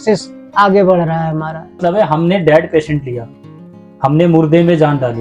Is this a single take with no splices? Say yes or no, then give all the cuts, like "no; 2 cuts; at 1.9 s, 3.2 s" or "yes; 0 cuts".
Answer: no; 1 cut; at 1.8 s